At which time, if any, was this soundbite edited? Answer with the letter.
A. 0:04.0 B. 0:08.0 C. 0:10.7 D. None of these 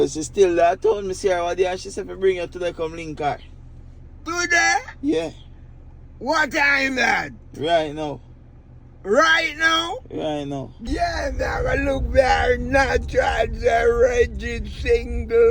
C